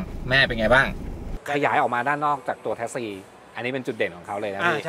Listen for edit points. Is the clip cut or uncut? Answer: cut